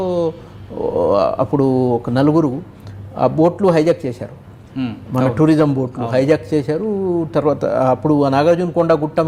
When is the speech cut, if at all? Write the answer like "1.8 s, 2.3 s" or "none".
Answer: none